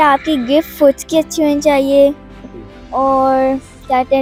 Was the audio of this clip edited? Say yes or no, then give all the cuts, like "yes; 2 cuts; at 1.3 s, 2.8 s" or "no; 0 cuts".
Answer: no; 0 cuts